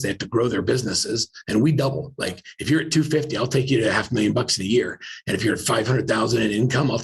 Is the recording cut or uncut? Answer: uncut